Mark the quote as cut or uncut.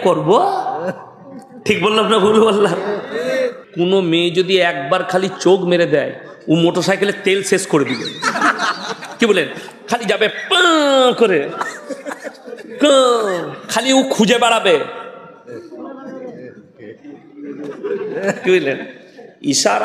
cut